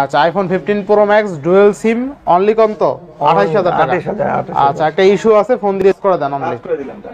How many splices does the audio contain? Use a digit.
1